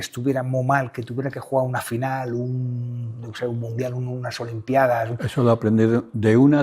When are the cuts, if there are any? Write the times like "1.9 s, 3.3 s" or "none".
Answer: none